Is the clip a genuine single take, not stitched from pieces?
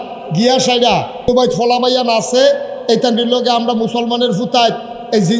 no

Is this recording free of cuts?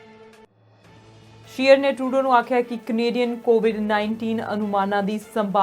no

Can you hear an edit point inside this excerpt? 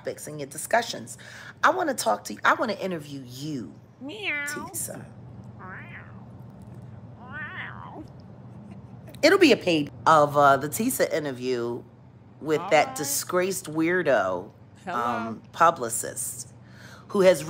yes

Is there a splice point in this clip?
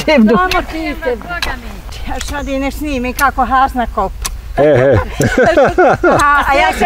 yes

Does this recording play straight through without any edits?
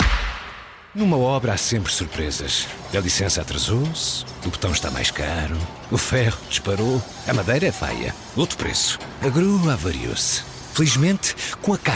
no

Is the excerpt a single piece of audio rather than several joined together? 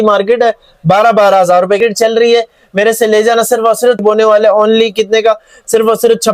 no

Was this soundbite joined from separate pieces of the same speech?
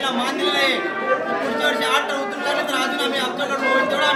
no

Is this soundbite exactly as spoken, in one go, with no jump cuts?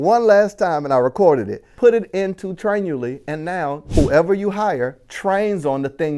no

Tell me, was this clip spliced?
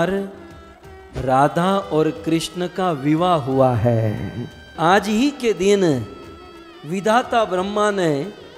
yes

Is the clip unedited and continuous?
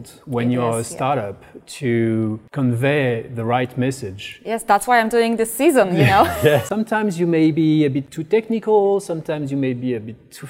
no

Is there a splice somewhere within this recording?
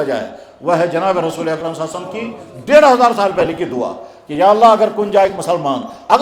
no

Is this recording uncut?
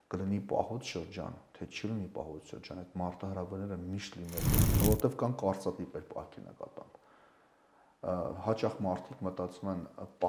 no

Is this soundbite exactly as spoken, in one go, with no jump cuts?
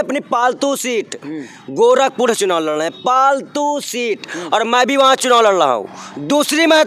yes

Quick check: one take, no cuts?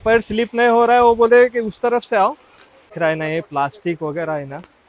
no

